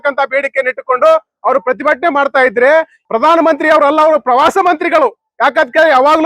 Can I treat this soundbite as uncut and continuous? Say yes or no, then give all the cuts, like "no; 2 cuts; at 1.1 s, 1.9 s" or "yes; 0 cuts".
no; 1 cut; at 3.0 s